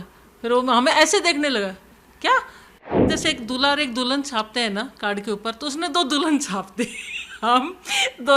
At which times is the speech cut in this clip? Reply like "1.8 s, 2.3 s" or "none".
3.1 s